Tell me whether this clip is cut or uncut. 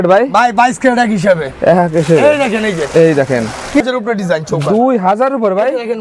cut